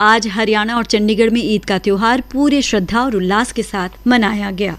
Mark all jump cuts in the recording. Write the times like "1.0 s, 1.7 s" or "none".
3.9 s

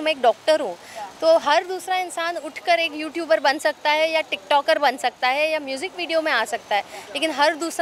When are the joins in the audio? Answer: none

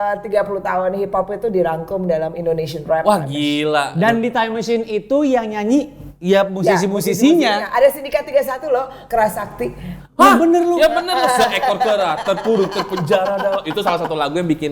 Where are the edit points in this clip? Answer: none

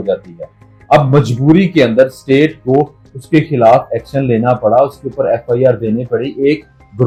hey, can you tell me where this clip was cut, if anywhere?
none

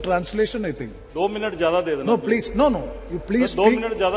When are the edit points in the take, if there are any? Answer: 1.0 s

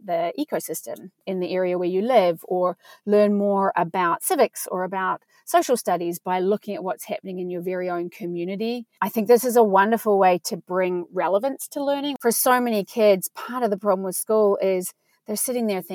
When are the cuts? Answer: 1.2 s, 12.1 s

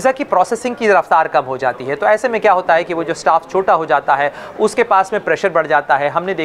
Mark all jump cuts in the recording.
none

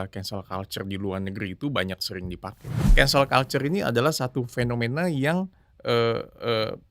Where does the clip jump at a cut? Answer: 2.8 s

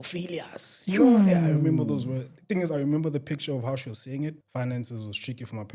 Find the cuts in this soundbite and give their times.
4.4 s

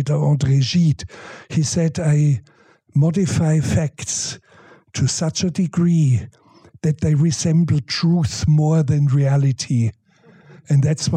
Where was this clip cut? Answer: none

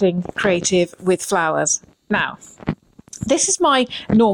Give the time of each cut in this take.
none

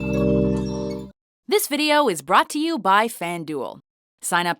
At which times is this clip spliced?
1.0 s

